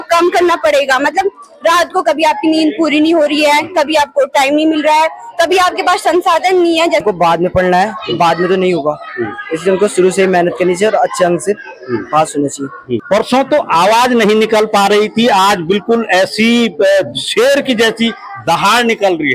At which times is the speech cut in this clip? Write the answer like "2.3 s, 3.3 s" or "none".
7.0 s, 13.0 s